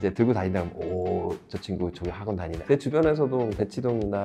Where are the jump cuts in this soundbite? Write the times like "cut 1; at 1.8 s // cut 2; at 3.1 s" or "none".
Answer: cut 1; at 2.6 s